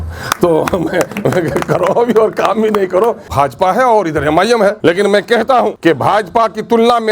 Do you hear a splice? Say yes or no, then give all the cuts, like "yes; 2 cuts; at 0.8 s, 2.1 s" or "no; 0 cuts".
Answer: yes; 3 cuts; at 3.2 s, 4.8 s, 5.8 s